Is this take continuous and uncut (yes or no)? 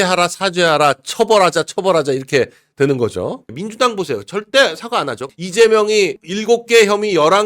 no